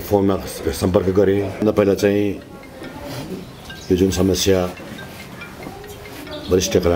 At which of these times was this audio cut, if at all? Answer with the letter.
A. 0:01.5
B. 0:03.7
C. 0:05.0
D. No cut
A